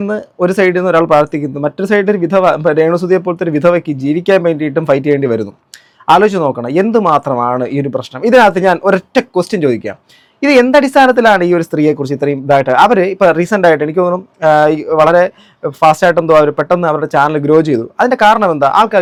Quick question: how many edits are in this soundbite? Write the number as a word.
zero